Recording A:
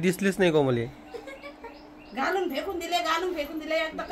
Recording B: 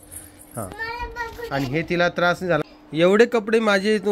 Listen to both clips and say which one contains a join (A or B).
B